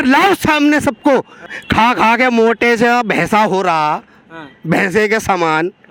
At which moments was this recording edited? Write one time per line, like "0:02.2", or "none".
0:01.5